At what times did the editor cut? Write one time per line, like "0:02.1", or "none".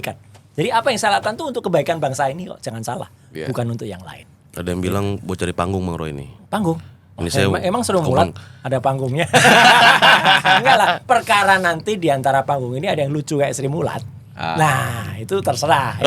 none